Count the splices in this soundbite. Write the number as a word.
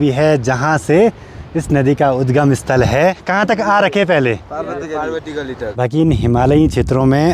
two